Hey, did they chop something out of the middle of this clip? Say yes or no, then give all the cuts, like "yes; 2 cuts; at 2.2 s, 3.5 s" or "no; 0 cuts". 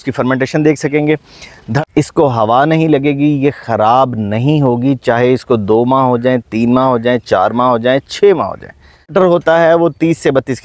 yes; 2 cuts; at 1.7 s, 9.1 s